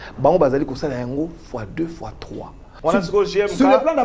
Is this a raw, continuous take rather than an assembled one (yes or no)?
no